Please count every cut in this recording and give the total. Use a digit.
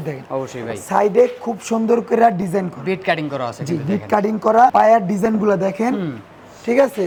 0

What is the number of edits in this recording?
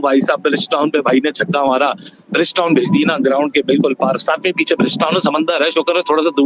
0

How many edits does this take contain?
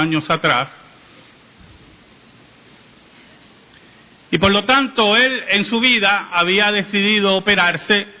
0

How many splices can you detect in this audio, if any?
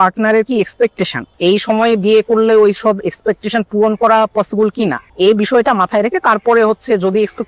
2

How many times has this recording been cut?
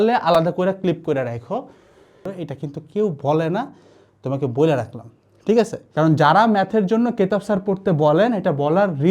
2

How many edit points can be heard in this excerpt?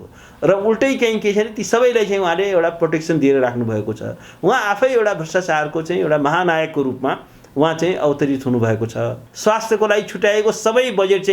1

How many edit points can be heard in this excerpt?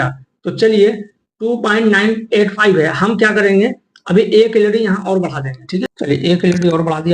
1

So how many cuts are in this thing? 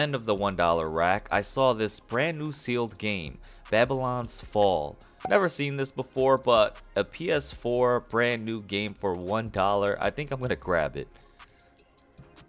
0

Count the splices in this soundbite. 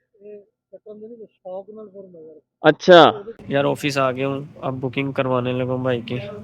1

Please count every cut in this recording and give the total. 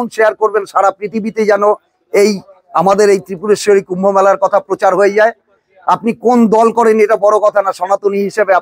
0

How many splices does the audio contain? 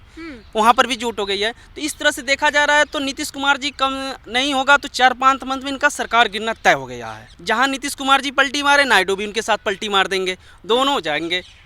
1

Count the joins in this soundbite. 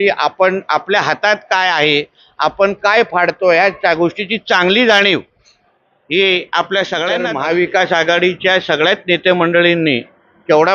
1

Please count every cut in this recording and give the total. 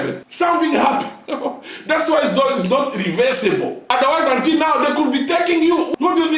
1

